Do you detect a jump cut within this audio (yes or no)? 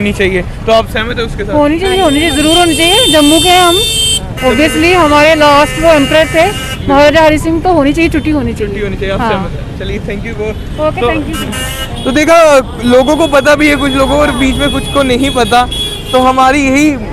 no